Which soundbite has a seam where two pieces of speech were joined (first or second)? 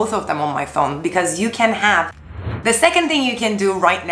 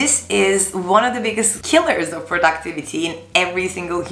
first